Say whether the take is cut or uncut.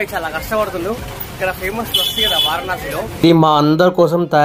cut